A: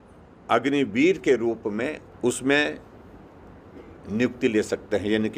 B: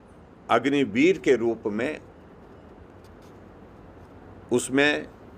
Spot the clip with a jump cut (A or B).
A